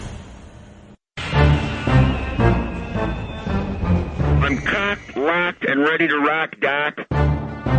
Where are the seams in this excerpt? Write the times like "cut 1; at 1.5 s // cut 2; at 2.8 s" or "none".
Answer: cut 1; at 1.2 s // cut 2; at 4.2 s